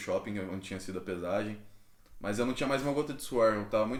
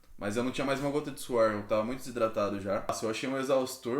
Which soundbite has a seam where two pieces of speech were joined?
second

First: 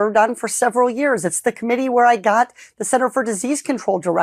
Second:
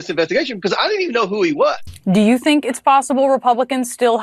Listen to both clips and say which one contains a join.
second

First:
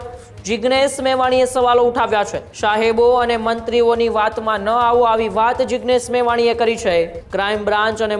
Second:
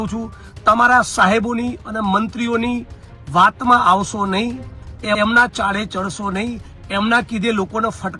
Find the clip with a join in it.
first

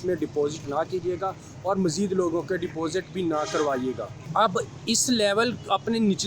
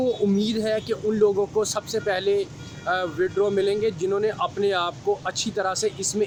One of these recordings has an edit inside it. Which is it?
first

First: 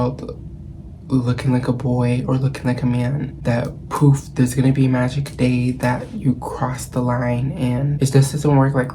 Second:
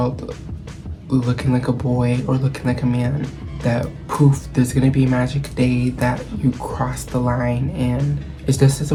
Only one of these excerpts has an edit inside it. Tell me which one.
first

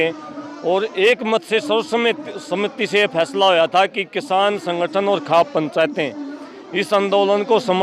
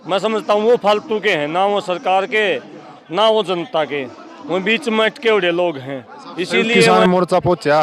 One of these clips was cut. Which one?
second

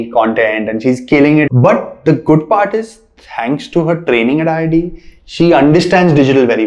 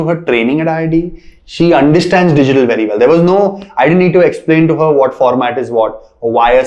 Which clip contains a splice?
first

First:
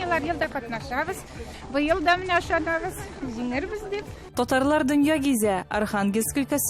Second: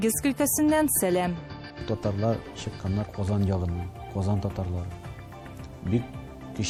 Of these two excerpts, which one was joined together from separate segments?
first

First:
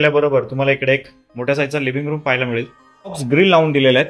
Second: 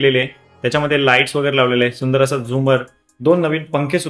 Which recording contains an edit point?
first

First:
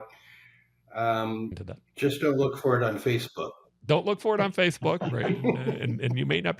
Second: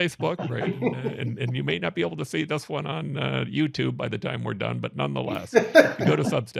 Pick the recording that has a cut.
first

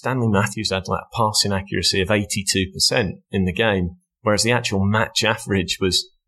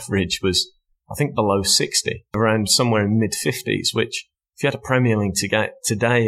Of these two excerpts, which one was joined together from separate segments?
second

